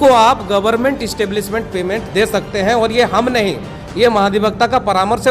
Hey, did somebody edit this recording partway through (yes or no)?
no